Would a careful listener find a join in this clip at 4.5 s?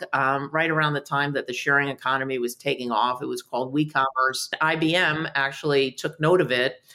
yes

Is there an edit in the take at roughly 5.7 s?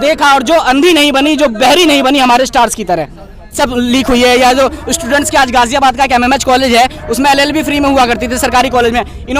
no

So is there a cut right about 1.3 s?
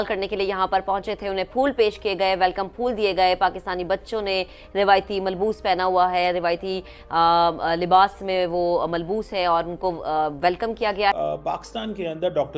no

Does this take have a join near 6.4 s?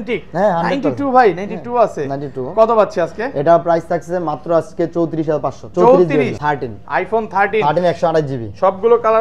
yes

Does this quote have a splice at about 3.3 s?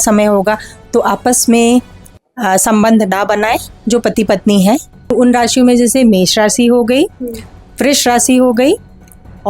no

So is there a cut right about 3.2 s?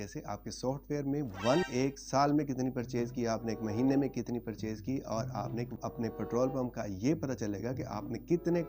no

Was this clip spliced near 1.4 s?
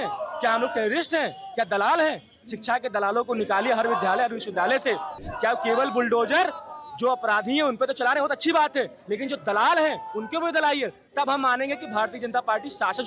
no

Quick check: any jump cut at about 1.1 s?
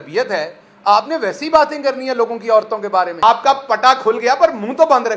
no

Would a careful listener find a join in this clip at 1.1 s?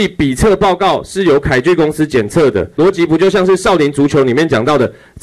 no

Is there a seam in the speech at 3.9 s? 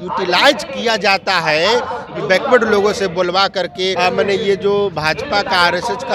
yes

